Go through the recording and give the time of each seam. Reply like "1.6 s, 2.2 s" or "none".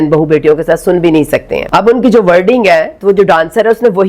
1.6 s